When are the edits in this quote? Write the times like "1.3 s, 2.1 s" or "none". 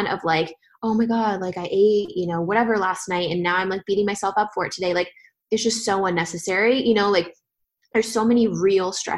none